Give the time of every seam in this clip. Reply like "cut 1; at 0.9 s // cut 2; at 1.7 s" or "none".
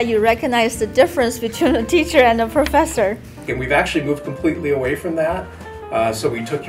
cut 1; at 3.5 s